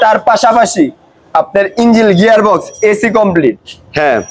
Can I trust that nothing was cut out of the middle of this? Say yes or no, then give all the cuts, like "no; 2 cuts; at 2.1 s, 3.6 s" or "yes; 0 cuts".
yes; 0 cuts